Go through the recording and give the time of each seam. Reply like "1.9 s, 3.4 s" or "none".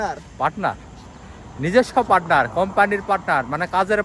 none